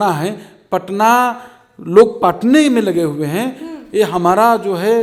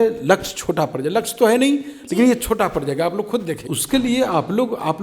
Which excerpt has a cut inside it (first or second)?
second